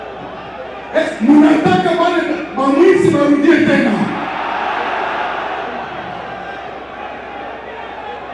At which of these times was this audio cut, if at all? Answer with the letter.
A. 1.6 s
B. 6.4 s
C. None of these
C